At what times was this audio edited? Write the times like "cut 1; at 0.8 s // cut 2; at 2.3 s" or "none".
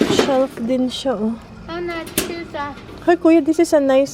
none

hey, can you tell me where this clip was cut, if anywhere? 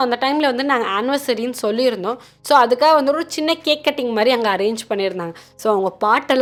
none

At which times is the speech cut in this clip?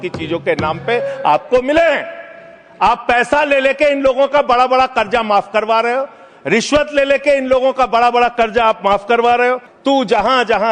cut 1; at 9.7 s

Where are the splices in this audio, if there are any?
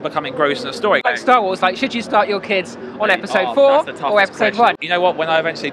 cut 1; at 1.0 s // cut 2; at 4.8 s

